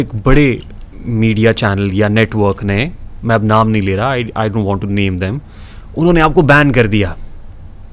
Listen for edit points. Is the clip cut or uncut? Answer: uncut